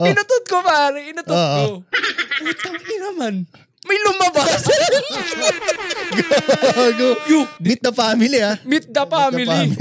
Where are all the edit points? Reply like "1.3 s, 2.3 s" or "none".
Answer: 7.5 s